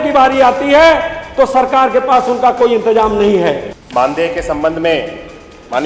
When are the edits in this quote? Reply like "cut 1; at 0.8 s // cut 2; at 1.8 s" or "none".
cut 1; at 4.1 s